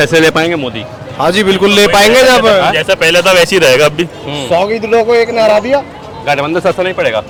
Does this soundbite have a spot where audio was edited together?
no; 0 cuts

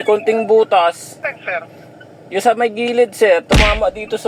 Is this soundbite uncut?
no; 1 cut; at 1.2 s

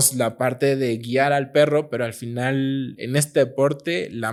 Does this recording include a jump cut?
no; 0 cuts

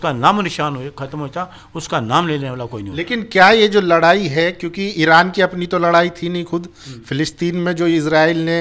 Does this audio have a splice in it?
no; 0 cuts

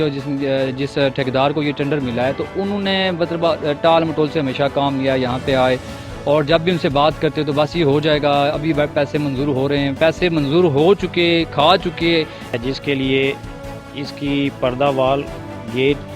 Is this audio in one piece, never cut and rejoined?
no; 1 cut; at 12.6 s

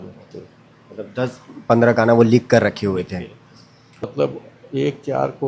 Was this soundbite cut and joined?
yes; 1 cut; at 4.0 s

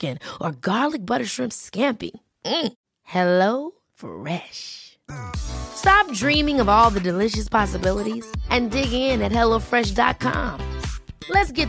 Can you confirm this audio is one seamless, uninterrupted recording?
yes; 0 cuts

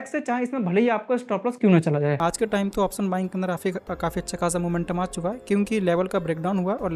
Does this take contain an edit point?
yes; 1 cut; at 2.2 s

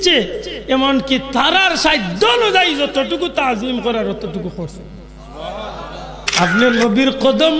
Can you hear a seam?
yes; 1 cut; at 6.2 s

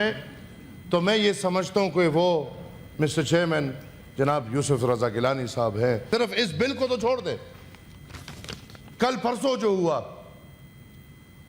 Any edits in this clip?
yes; 1 cut; at 6.1 s

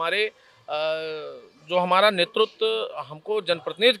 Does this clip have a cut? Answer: no; 0 cuts

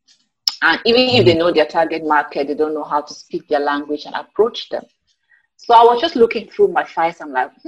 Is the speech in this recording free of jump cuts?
yes; 0 cuts

